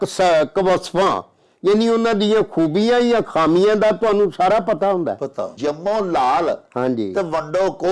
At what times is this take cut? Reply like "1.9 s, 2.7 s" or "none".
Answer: 5.5 s